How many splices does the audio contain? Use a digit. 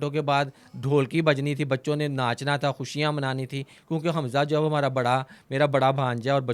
0